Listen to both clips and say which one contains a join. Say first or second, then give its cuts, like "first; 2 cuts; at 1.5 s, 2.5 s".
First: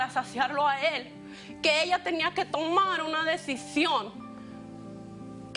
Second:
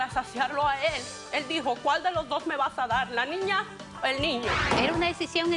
second; 2 cuts; at 1.1 s, 4.7 s